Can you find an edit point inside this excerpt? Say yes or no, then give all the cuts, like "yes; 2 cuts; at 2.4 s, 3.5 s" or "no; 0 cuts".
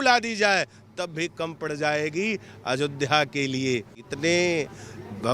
yes; 1 cut; at 4.0 s